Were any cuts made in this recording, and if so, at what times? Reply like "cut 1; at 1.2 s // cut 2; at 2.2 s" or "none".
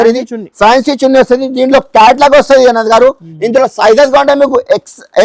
none